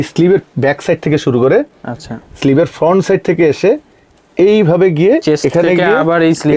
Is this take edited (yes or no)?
no